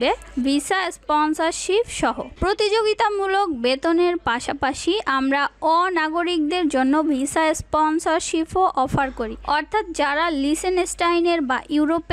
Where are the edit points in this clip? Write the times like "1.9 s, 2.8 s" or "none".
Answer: 2.3 s